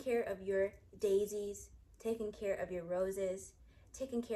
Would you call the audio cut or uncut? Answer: uncut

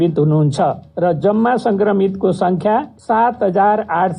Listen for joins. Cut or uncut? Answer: cut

